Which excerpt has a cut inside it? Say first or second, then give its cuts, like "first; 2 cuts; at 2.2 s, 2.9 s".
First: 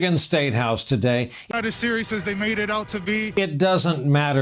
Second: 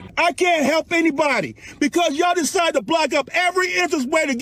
first; 2 cuts; at 1.4 s, 3.3 s